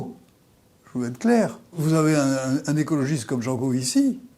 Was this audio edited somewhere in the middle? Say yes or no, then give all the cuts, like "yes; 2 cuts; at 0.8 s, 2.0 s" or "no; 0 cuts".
yes; 1 cut; at 1.8 s